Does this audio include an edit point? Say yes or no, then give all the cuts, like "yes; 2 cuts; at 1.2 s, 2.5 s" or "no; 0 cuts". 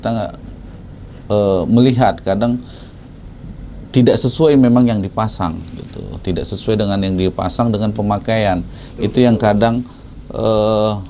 no; 0 cuts